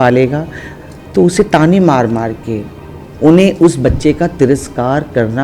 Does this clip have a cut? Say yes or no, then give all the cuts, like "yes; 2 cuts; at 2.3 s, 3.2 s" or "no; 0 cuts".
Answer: yes; 1 cut; at 3.1 s